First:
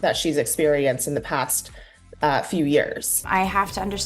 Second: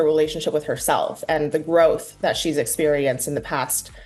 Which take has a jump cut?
first; 1 cut; at 3.1 s

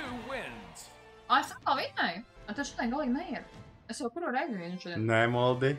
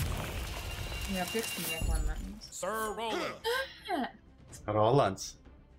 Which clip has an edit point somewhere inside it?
first; 1 cut; at 2.3 s

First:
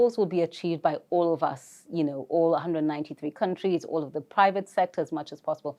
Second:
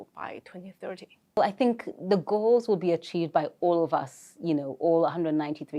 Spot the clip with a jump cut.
second; 1 cut; at 1.4 s

